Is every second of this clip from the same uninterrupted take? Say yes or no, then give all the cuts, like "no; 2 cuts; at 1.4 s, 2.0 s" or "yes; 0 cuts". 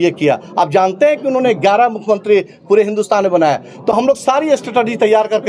yes; 0 cuts